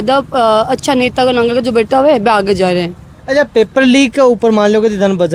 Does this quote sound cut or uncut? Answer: uncut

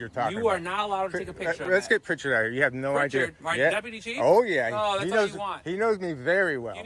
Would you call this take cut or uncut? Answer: uncut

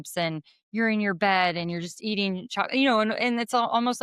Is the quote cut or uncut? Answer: uncut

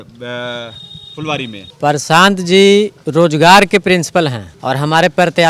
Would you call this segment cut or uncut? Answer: cut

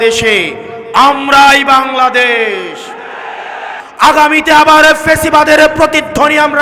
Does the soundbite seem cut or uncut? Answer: cut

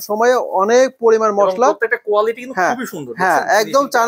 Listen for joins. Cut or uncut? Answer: uncut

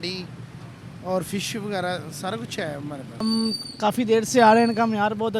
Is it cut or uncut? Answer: cut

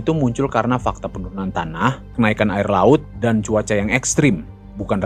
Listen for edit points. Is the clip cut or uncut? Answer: uncut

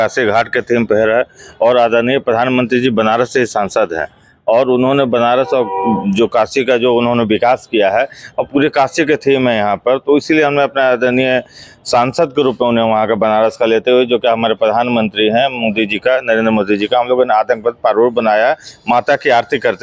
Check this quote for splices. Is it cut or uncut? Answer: uncut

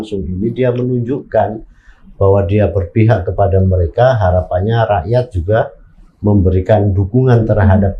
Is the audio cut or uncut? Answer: uncut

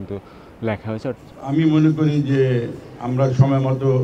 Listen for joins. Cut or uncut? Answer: cut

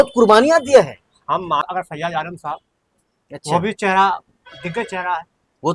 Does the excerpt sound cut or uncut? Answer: cut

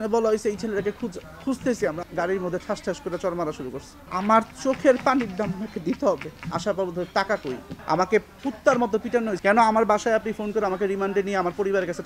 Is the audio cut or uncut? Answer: cut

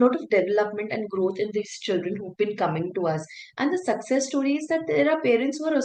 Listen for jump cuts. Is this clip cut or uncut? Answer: uncut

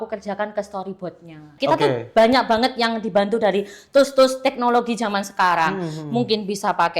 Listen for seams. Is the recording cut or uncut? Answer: cut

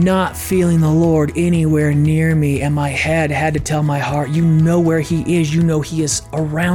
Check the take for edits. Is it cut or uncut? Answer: uncut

